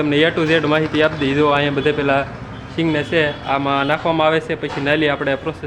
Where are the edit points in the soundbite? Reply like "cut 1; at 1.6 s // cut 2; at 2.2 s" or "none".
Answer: none